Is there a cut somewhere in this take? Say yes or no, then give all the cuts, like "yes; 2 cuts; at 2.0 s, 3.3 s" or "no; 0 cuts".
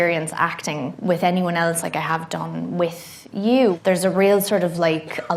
yes; 1 cut; at 3.8 s